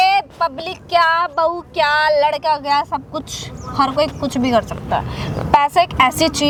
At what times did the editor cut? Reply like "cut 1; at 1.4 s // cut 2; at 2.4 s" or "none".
none